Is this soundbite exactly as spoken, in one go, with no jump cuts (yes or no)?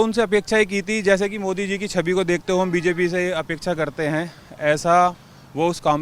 yes